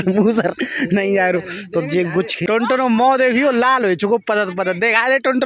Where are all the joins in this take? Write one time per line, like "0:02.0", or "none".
0:02.5